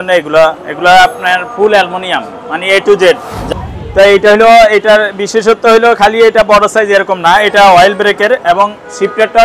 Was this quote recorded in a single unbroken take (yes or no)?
no